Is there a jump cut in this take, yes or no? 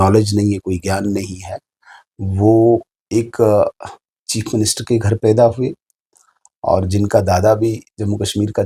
no